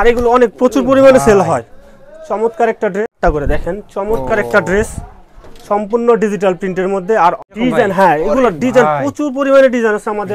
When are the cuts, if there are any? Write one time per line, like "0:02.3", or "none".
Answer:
0:03.2
0:07.4